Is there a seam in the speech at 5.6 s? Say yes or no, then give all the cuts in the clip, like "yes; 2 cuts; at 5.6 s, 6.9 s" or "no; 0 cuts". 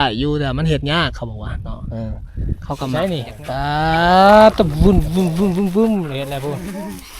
no; 1 cut; at 2.9 s